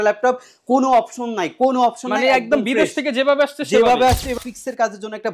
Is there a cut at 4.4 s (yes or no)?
yes